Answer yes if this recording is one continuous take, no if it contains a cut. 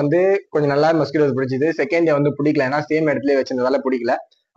yes